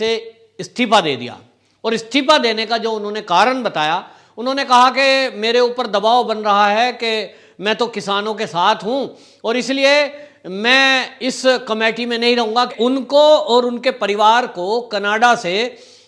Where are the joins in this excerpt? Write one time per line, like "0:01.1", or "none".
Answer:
0:12.7

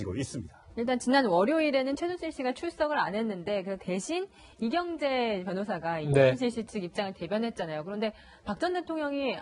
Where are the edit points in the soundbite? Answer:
none

